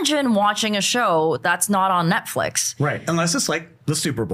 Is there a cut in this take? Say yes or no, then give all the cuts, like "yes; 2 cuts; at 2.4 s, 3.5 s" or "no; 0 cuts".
no; 0 cuts